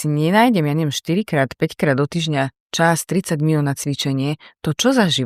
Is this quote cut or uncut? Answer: uncut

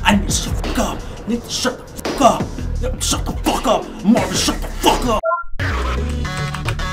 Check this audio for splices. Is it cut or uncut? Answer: uncut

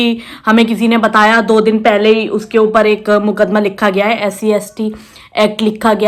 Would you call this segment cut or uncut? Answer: uncut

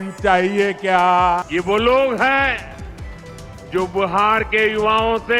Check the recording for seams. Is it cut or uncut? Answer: cut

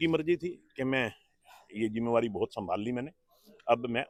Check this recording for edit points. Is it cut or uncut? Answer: uncut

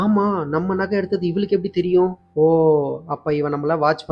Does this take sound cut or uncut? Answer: uncut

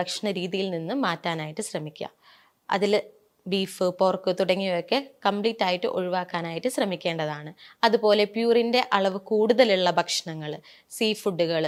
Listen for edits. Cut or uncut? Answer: uncut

